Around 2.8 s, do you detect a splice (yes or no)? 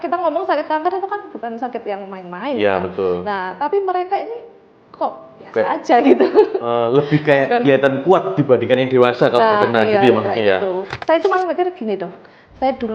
no